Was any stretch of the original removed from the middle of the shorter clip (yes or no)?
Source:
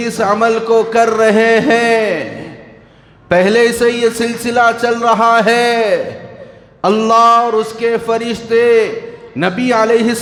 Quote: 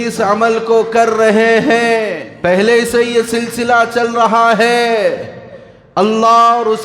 yes